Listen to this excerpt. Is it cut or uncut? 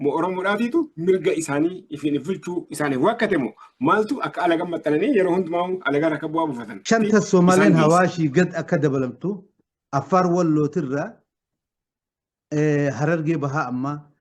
cut